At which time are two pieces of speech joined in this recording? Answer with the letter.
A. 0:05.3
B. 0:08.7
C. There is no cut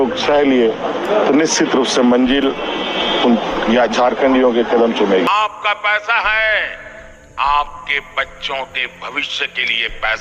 A